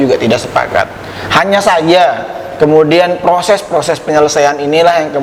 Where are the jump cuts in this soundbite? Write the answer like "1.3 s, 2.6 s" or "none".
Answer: none